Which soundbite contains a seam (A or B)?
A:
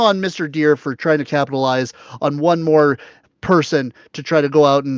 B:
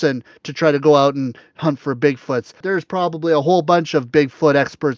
B